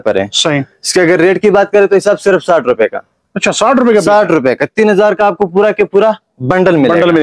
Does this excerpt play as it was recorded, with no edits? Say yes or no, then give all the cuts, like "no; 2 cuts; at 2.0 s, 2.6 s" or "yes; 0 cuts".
yes; 0 cuts